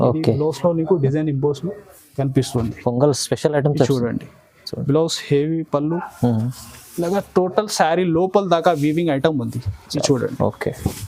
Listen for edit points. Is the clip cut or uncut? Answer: uncut